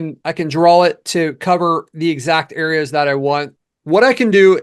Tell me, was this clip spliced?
yes; 1 cut; at 3.5 s

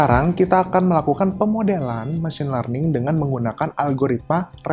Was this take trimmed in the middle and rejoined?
no; 0 cuts

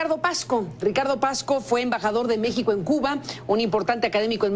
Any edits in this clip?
yes; 1 cut; at 3.0 s

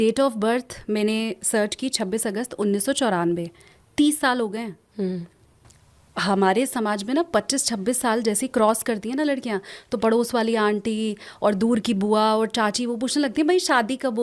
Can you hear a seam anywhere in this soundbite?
no; 0 cuts

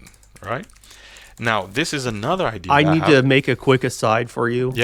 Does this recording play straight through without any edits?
yes; 0 cuts

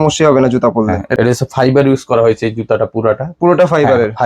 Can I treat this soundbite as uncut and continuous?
no; 1 cut; at 1.1 s

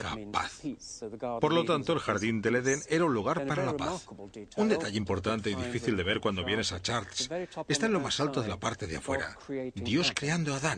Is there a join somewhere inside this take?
yes; 1 cut; at 7.5 s

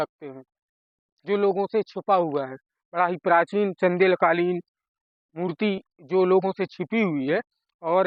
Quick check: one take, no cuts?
yes; 0 cuts

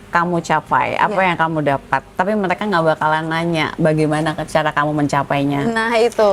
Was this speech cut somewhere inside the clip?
no; 0 cuts

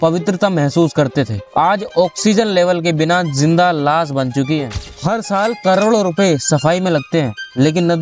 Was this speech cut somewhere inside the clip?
yes; 1 cut; at 4.9 s

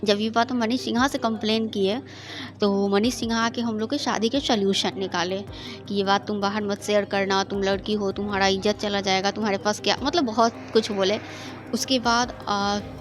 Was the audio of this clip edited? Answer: no; 0 cuts

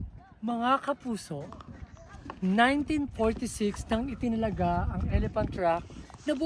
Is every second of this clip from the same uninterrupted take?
yes; 0 cuts

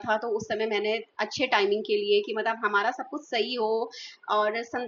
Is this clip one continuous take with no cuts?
yes; 0 cuts

